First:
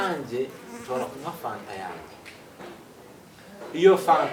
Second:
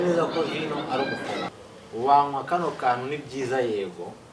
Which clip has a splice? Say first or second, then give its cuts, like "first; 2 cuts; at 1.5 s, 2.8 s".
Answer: second; 1 cut; at 1.5 s